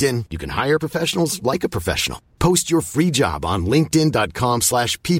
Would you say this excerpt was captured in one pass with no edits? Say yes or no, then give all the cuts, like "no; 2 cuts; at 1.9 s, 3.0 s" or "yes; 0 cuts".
yes; 0 cuts